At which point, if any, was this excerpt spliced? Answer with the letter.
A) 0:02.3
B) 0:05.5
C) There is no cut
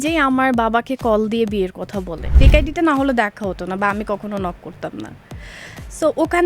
A